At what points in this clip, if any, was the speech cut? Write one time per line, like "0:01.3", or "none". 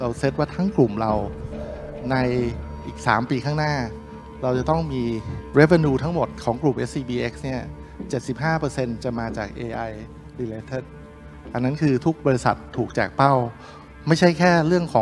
0:05.3
0:06.4